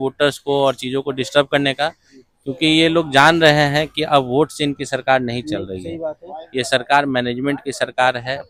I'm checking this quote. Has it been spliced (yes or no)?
no